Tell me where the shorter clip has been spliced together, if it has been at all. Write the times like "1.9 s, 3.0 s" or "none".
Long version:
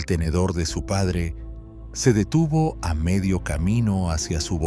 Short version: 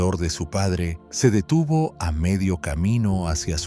1.0 s